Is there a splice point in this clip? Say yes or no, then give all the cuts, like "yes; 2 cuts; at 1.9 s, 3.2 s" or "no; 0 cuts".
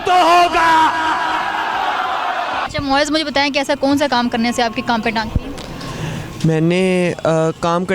no; 0 cuts